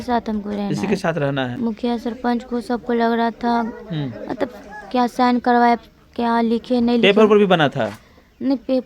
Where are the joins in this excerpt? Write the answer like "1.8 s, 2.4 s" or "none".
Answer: 1.5 s